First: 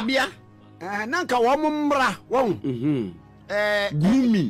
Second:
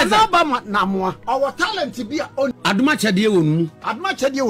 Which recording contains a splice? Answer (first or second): second